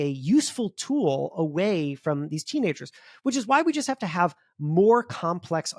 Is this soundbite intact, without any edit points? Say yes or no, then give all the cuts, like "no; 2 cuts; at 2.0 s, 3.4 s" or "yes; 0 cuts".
yes; 0 cuts